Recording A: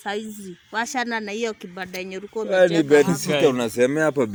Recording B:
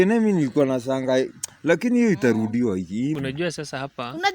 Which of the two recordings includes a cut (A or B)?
B